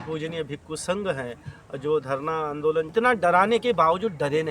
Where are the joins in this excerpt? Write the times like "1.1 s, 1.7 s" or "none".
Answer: 2.9 s